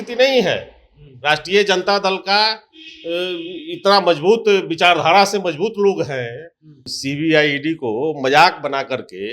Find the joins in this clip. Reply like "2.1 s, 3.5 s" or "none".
6.9 s